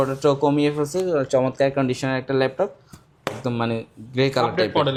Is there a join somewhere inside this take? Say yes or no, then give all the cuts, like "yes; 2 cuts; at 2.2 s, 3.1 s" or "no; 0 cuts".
no; 0 cuts